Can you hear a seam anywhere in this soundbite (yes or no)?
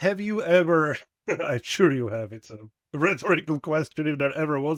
no